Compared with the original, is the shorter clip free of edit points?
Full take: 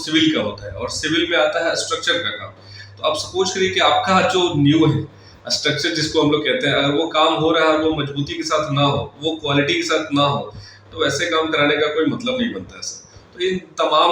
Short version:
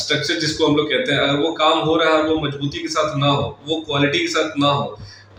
yes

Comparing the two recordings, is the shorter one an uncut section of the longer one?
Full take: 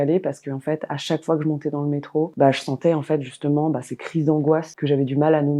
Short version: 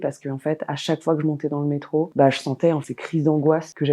no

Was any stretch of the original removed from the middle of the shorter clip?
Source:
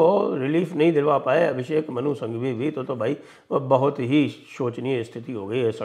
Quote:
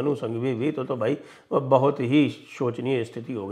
no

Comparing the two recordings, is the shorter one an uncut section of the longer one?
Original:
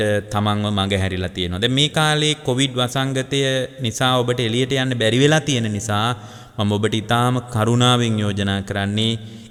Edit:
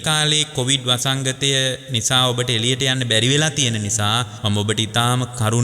no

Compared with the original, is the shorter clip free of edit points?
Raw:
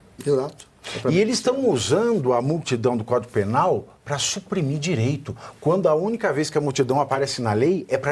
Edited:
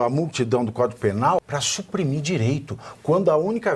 no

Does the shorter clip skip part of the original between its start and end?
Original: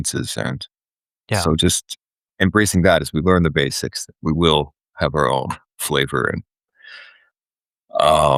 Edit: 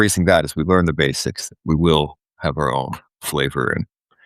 no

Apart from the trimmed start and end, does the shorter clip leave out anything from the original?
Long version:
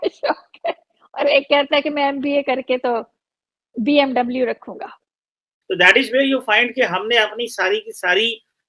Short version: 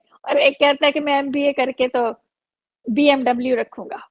no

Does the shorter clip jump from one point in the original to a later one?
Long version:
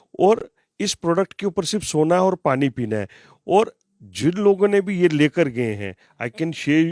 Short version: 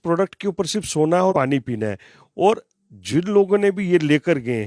yes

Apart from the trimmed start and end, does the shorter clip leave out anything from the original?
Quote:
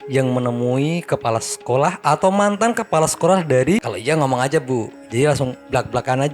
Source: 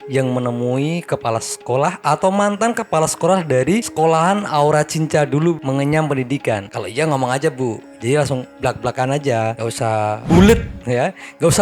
yes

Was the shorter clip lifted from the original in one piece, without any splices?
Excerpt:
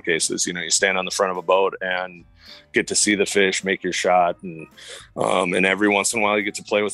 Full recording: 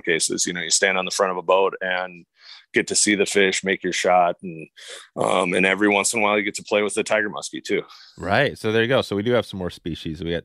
yes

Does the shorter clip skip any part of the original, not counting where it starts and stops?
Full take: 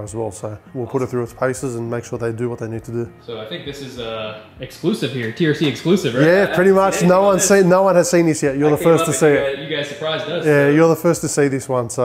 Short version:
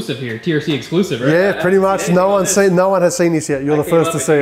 no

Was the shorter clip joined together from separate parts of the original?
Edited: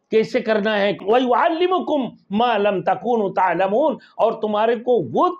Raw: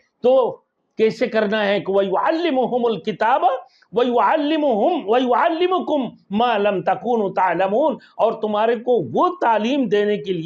yes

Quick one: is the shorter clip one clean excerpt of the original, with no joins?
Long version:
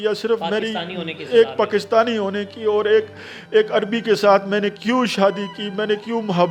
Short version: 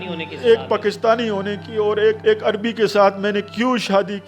no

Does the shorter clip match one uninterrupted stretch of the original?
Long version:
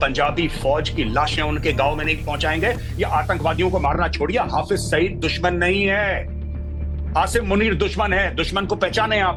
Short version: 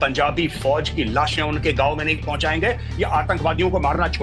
yes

